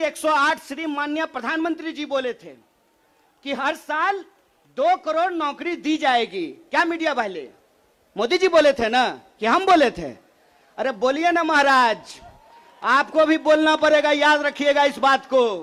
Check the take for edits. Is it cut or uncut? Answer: uncut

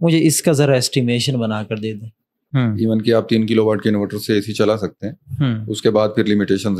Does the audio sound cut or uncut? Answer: cut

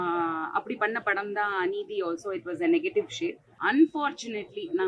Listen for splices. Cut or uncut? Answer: cut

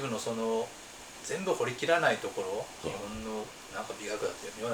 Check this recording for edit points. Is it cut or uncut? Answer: cut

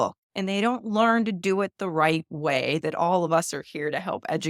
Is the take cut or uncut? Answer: uncut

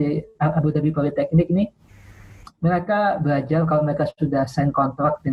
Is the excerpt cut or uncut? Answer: uncut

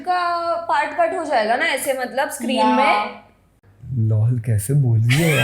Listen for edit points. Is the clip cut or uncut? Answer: cut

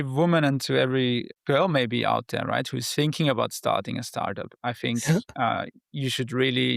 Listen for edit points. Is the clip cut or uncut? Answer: cut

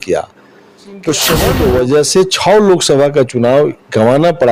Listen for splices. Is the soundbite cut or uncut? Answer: cut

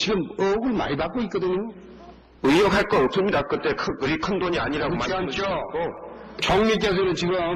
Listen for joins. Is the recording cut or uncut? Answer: cut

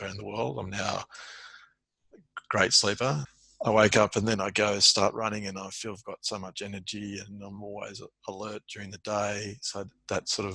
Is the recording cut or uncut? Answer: cut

